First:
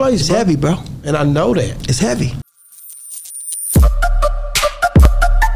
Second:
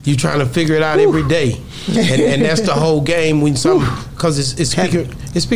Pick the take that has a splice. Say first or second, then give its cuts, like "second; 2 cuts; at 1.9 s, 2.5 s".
first; 1 cut; at 2.4 s